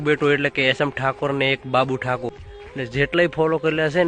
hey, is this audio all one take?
no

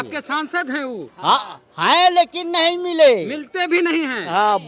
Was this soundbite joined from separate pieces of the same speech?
no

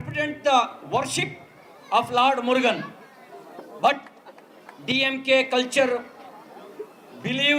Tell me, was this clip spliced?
no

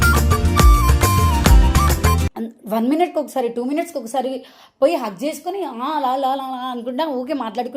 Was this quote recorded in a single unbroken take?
no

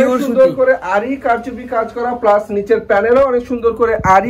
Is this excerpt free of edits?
yes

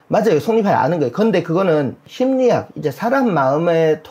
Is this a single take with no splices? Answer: no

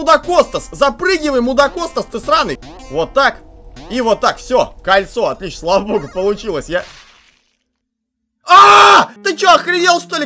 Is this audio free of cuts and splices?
no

